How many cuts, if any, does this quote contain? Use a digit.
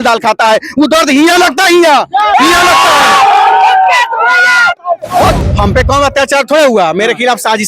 1